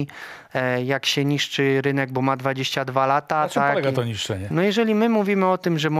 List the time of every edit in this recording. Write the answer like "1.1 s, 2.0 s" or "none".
4.4 s